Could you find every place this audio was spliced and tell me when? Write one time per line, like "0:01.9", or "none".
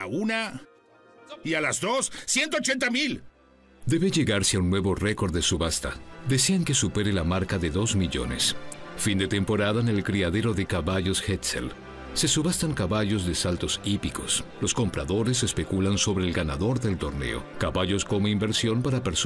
0:08.5